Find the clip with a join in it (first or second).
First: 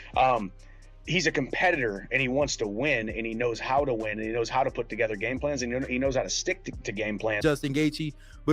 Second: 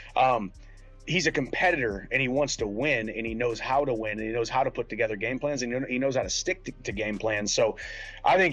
first